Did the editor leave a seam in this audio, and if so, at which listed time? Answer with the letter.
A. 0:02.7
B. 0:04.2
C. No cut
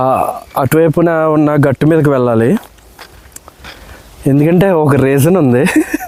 C